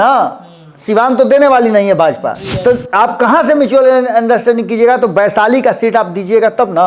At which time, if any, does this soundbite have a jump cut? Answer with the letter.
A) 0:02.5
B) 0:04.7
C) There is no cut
A